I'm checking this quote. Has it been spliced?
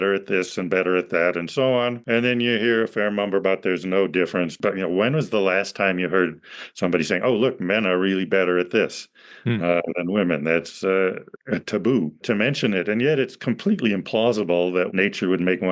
yes; 5 cuts; at 2.0 s, 4.6 s, 11.3 s, 12.2 s, 14.9 s

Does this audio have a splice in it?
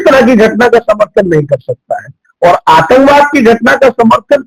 no; 0 cuts

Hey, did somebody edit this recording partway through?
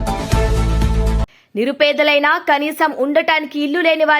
yes; 1 cut; at 1.2 s

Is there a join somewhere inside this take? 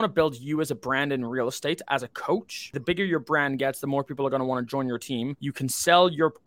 yes; 2 cuts; at 2.7 s, 5.4 s

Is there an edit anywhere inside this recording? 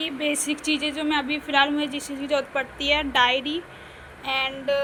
no; 0 cuts

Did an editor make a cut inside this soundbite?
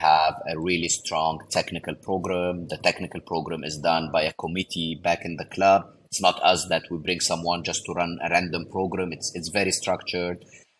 yes; 1 cut; at 4.9 s

